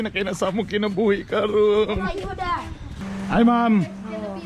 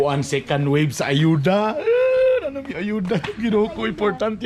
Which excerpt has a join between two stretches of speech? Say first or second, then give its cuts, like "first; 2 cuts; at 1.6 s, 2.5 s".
first; 1 cut; at 3.2 s